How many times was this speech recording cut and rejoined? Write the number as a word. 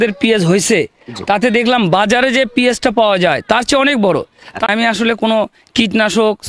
one